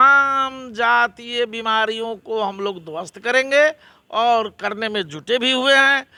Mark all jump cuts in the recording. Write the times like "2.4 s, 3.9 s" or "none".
none